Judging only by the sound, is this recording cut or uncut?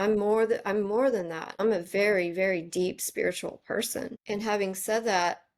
cut